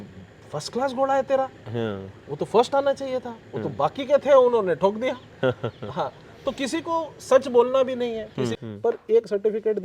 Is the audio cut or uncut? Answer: cut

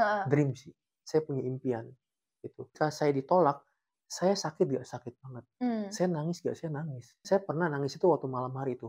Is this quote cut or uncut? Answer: cut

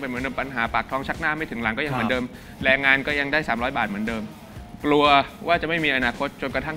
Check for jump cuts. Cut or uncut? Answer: uncut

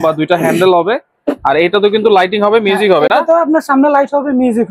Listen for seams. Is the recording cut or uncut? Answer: uncut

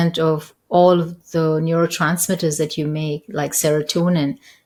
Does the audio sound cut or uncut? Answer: uncut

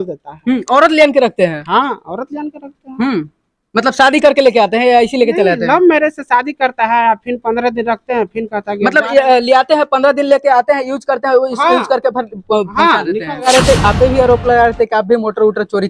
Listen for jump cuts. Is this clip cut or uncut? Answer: cut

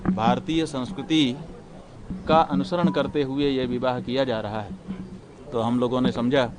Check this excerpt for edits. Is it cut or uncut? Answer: uncut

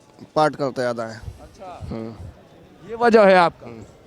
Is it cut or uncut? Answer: uncut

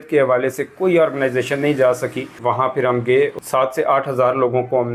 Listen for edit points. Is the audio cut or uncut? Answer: cut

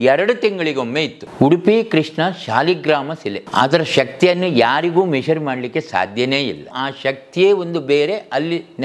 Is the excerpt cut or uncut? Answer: cut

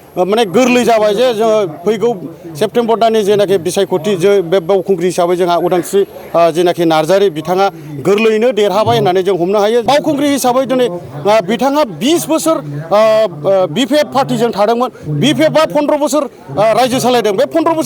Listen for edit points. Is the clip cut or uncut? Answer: cut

